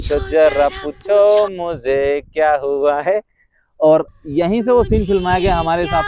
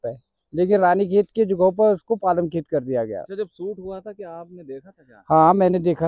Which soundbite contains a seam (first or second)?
second